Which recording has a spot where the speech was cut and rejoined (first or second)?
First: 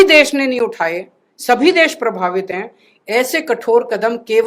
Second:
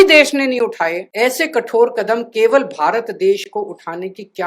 second